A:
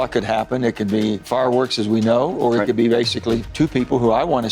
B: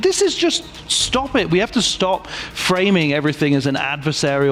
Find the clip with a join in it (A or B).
A